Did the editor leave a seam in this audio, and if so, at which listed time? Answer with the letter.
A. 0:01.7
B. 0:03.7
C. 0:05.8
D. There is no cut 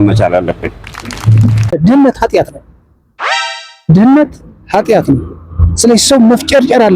A